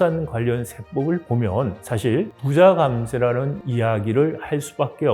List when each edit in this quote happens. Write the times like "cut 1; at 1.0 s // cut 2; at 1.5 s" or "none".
none